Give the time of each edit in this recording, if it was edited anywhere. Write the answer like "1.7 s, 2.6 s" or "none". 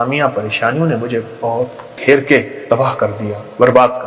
3.1 s